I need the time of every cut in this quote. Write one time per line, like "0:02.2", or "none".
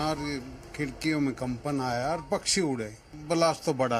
0:03.1